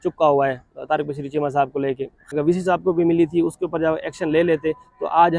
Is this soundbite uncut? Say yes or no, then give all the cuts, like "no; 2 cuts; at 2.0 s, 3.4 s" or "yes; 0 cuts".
no; 1 cut; at 2.3 s